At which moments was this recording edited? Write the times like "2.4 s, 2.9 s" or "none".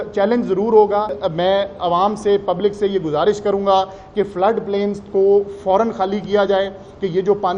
1.2 s